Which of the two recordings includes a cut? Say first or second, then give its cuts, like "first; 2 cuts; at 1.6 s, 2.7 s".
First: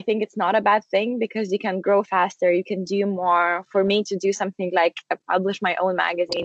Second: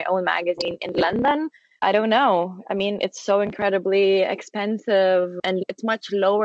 second; 2 cuts; at 1.6 s, 5.5 s